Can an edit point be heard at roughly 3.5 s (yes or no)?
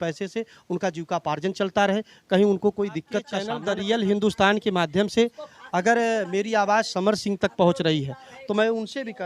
yes